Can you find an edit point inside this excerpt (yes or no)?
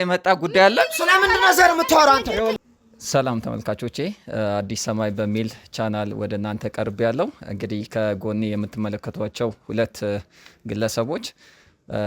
yes